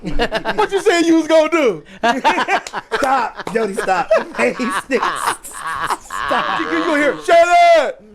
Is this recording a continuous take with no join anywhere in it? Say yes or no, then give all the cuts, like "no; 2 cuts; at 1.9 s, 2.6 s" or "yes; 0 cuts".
no; 1 cut; at 6.7 s